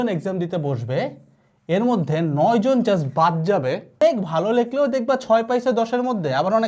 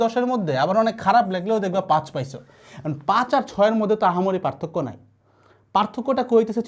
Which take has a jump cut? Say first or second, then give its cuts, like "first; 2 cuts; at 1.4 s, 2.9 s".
first; 1 cut; at 4.0 s